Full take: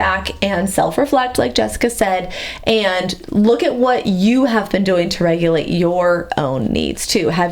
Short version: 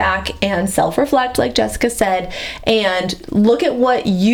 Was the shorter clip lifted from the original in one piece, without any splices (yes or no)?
yes